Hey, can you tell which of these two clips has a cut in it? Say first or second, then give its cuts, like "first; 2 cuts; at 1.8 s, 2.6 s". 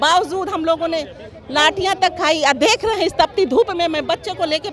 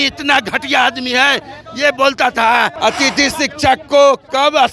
second; 1 cut; at 2.7 s